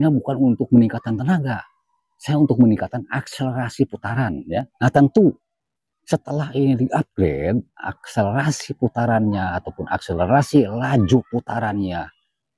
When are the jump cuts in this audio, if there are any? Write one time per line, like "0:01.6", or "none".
0:04.7